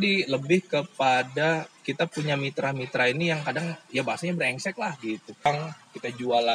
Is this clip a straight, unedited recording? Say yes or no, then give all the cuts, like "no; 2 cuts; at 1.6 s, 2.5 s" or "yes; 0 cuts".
no; 1 cut; at 5.5 s